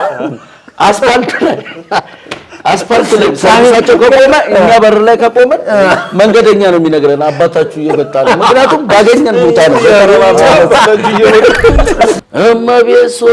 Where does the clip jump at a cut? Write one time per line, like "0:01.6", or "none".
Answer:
0:12.2